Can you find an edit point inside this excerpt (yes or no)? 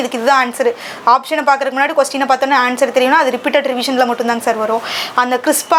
no